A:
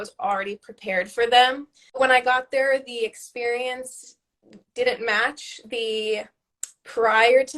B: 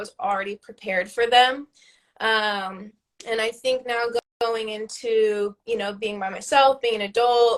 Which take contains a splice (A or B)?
A